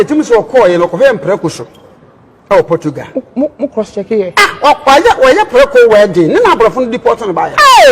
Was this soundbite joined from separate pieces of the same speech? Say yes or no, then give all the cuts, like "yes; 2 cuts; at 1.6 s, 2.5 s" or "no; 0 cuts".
no; 0 cuts